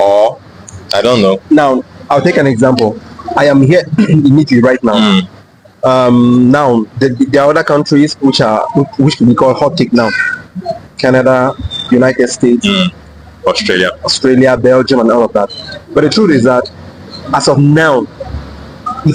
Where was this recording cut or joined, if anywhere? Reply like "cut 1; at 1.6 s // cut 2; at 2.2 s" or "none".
none